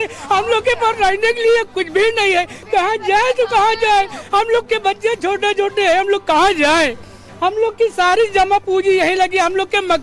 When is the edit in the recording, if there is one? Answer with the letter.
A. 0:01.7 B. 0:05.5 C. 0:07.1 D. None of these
D